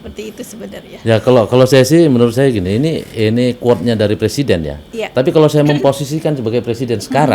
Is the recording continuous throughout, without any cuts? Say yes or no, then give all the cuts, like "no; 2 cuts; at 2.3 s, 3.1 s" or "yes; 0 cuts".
yes; 0 cuts